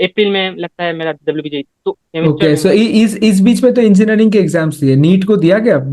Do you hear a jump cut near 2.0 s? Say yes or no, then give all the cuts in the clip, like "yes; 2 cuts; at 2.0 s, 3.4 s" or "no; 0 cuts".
yes; 1 cut; at 2.0 s